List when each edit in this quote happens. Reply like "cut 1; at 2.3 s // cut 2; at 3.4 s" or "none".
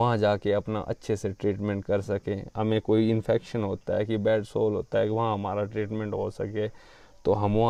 none